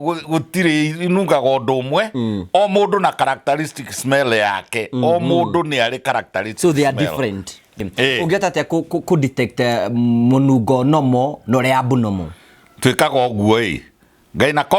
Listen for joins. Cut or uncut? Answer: cut